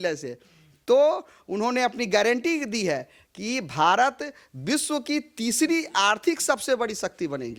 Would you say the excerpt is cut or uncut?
uncut